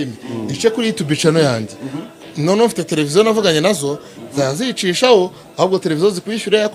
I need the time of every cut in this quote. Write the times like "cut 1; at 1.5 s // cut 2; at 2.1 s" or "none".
none